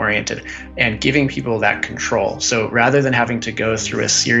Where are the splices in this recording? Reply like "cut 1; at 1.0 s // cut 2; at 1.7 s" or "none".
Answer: none

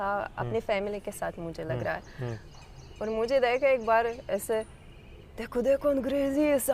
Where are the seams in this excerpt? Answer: none

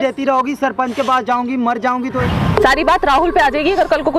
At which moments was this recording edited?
cut 1; at 2.2 s

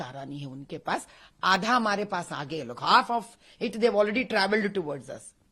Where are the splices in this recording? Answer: cut 1; at 0.9 s

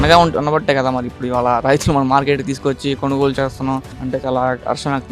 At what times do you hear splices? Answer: cut 1; at 3.9 s

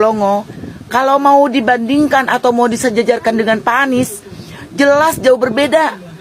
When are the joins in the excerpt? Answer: cut 1; at 0.9 s

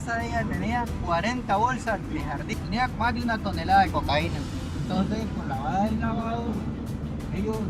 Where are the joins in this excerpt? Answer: cut 1; at 2.4 s // cut 2; at 4.8 s

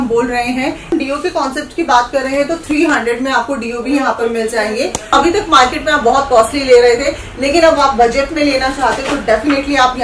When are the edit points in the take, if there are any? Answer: cut 1; at 0.9 s // cut 2; at 5.0 s

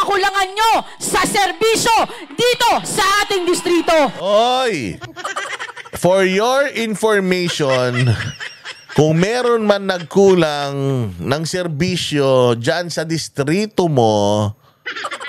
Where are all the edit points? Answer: none

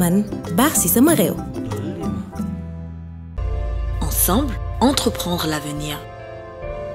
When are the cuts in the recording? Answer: cut 1; at 3.5 s

